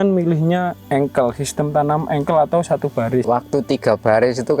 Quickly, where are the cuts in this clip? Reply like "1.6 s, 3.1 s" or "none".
3.2 s